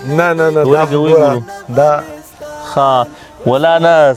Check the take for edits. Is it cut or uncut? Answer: uncut